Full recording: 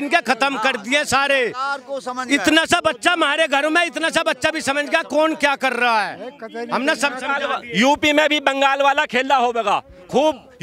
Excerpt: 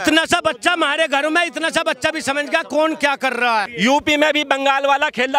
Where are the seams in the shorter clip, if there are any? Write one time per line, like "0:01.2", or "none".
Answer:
0:03.7